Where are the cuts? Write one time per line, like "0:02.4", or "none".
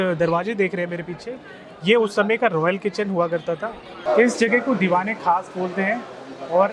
0:04.0